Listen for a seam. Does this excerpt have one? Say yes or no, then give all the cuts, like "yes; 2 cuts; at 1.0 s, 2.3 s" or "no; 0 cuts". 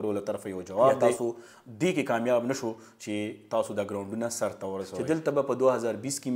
yes; 2 cuts; at 1.0 s, 4.9 s